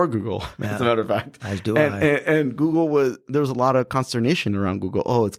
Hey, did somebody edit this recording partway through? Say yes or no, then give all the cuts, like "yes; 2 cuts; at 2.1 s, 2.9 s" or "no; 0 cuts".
no; 0 cuts